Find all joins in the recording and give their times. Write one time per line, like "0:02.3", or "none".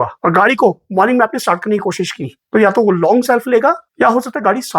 0:03.9